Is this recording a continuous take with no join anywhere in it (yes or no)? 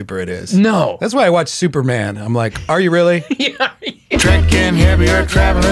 no